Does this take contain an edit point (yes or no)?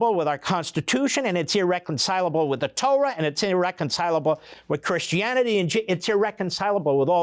no